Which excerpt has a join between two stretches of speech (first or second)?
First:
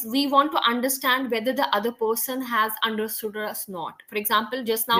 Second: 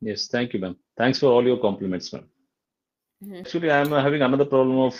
second